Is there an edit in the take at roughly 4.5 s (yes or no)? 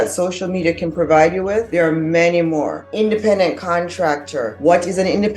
yes